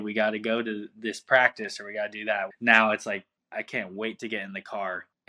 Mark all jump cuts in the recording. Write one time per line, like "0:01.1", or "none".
0:02.5